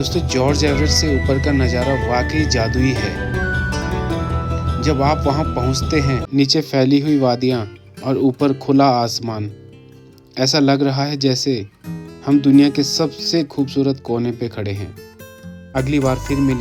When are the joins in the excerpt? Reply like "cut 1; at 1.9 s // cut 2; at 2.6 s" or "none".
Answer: cut 1; at 6.2 s // cut 2; at 15.7 s